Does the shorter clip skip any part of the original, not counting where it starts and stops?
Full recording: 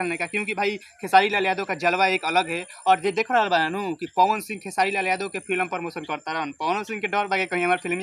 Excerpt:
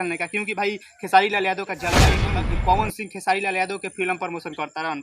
yes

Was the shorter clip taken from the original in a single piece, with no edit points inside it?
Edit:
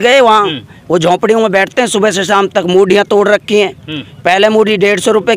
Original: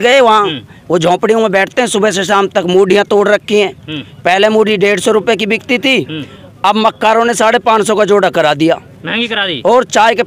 yes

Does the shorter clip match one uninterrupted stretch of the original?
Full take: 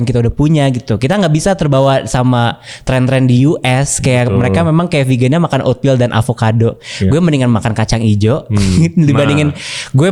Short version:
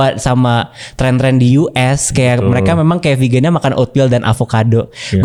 yes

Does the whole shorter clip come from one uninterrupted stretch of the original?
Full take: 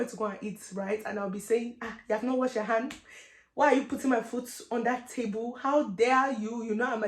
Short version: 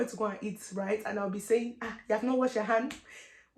yes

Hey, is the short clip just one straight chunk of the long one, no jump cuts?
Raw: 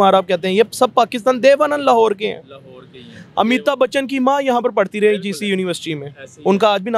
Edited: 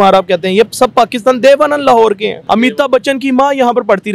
no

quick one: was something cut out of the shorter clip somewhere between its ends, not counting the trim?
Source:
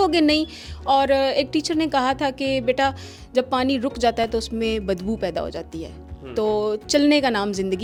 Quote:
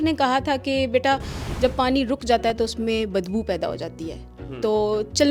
no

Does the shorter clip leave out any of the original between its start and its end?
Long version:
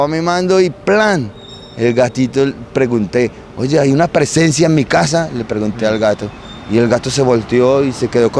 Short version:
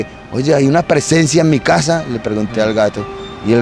no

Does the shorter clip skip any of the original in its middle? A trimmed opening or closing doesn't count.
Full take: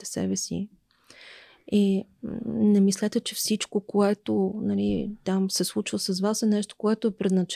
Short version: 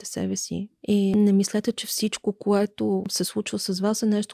yes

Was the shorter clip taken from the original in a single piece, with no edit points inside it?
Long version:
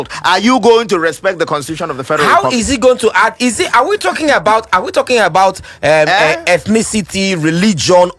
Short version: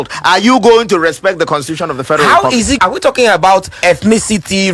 no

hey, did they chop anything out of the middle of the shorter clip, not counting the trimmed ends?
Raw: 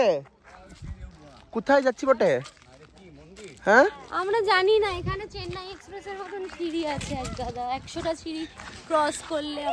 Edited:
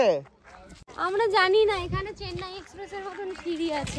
yes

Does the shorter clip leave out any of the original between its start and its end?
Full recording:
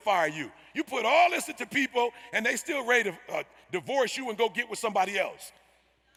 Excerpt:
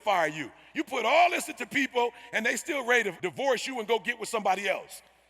yes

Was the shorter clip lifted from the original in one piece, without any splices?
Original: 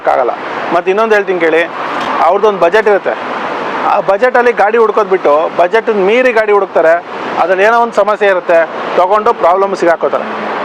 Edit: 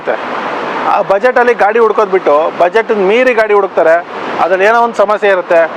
yes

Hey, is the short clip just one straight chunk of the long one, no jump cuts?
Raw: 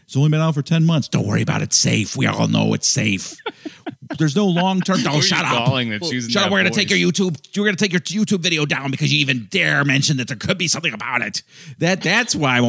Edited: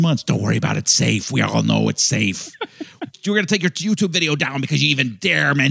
no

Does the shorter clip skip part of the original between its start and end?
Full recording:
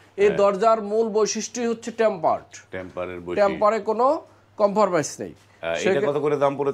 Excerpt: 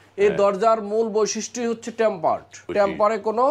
yes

